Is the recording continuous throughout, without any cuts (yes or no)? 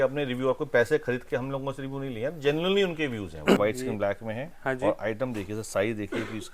no